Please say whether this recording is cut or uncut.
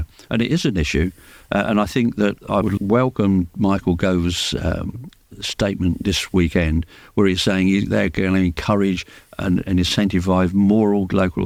uncut